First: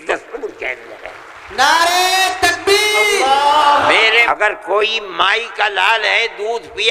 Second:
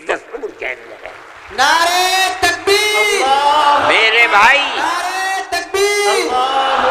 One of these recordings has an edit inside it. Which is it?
first; 1 cut; at 4.2 s

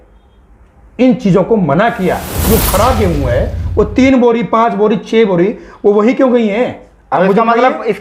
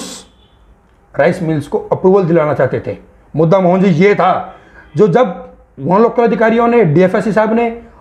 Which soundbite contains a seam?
first; 1 cut; at 2.4 s

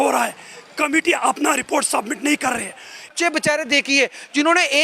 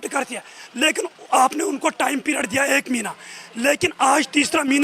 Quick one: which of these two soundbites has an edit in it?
first; 1 cut; at 3.1 s

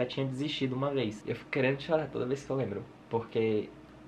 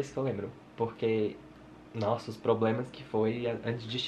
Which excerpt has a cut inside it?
first; 1 cut; at 1.2 s

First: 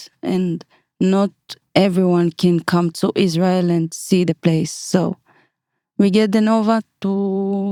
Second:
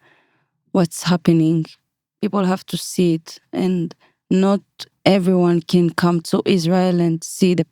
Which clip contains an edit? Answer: second; 1 cut; at 1.7 s

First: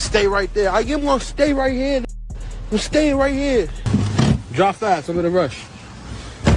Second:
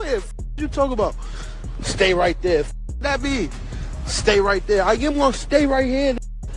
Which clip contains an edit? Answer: first; 1 cut; at 3.8 s

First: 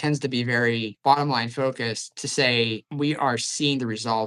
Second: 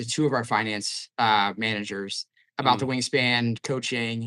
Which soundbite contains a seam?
first; 2 cuts; at 1.0 s, 2.8 s

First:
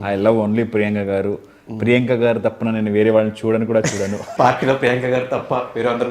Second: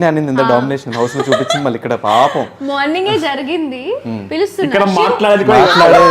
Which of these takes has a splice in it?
first; 1 cut; at 4.2 s

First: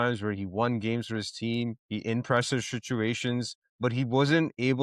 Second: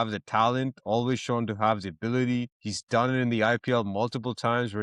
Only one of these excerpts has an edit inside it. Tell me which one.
first; 1 cut; at 1.8 s

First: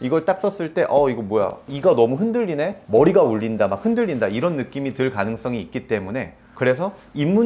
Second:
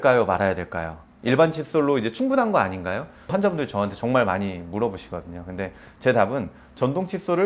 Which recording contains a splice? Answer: first; 1 cut; at 6.4 s

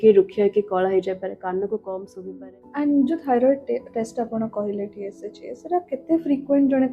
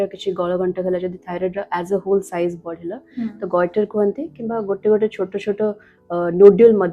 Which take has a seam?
first; 1 cut; at 2.1 s

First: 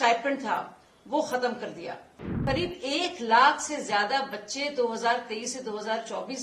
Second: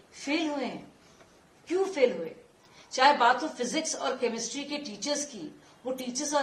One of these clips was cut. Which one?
first; 1 cut; at 2.3 s

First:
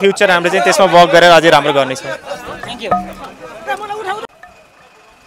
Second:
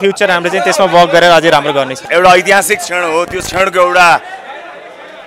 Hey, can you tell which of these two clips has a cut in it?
second; 1 cut; at 2.0 s

